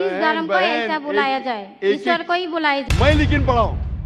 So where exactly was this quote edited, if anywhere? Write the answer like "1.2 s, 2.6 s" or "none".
2.8 s